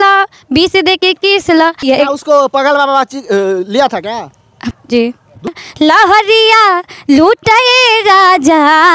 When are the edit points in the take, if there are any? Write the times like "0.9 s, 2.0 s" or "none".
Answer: 1.8 s, 4.6 s, 5.5 s